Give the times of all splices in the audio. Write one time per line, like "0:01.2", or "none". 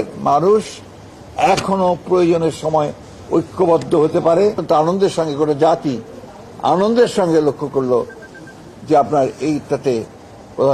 0:04.6